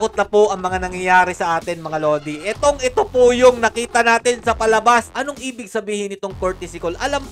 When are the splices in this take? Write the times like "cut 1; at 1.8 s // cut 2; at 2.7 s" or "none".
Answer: cut 1; at 5.1 s